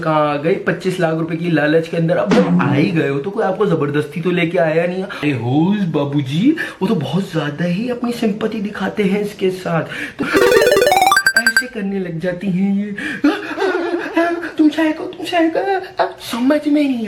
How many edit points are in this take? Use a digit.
2